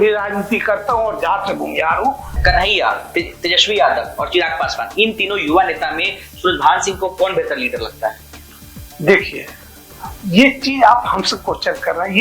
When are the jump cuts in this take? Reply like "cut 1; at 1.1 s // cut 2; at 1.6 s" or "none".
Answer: cut 1; at 2.3 s

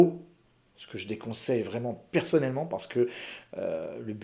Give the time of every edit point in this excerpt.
none

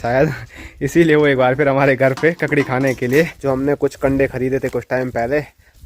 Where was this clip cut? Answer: cut 1; at 3.4 s

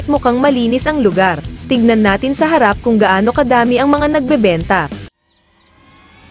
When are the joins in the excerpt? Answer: none

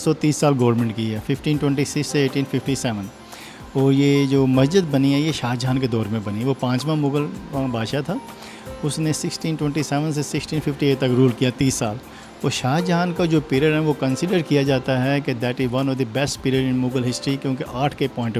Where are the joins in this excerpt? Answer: none

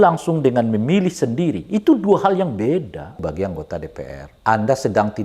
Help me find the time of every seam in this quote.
cut 1; at 3.2 s // cut 2; at 4.2 s

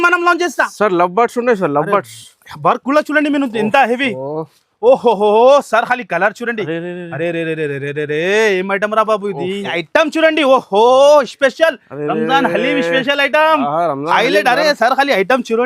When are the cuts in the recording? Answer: cut 1; at 9.7 s

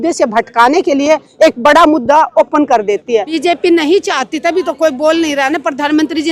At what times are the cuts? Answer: cut 1; at 3.4 s

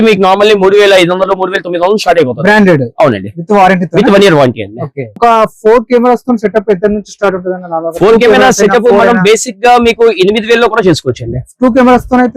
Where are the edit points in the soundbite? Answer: cut 1; at 5.2 s

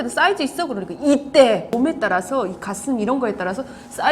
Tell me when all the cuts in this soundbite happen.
cut 1; at 1.7 s

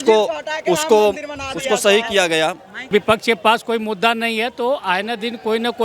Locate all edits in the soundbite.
cut 1; at 2.9 s

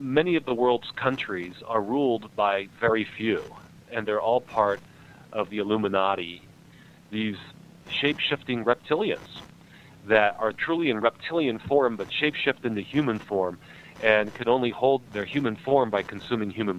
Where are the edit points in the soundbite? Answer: cut 1; at 3.8 s // cut 2; at 5.5 s // cut 3; at 6.6 s // cut 4; at 7.8 s // cut 5; at 10.6 s // cut 6; at 15.0 s

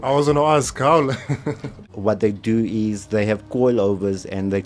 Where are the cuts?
cut 1; at 1.8 s

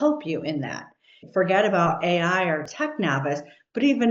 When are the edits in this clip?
cut 1; at 1.2 s

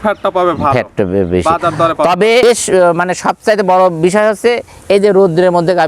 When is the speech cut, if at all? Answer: cut 1; at 2.4 s

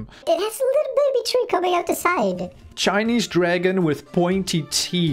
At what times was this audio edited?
cut 1; at 2.7 s

